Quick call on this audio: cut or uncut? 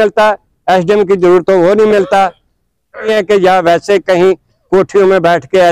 cut